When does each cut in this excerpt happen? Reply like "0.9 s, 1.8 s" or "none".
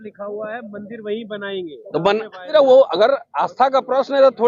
2.4 s